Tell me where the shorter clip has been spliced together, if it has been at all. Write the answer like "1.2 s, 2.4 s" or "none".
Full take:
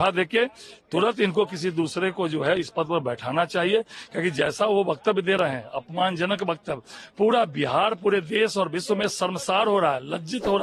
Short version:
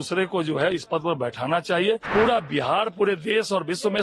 2.0 s